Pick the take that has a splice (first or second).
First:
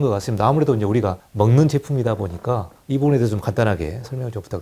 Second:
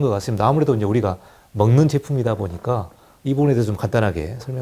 first